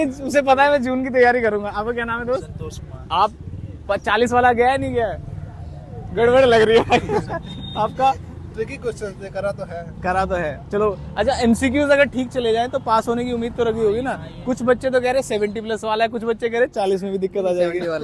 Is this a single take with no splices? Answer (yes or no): yes